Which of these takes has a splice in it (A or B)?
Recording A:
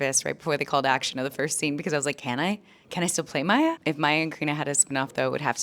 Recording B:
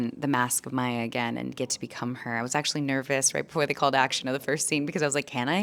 A